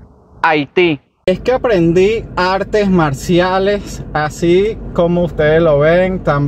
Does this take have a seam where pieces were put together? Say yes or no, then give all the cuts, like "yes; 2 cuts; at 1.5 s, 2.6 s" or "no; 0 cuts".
yes; 1 cut; at 1.2 s